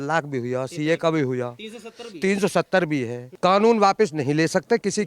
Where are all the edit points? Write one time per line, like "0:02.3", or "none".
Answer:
0:03.2